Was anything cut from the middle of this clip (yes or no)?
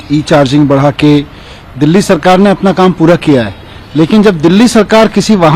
no